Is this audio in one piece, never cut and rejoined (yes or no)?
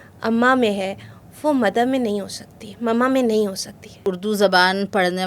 no